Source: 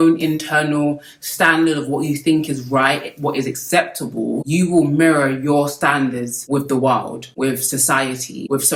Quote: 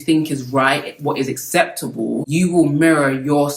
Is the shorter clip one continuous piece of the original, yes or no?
yes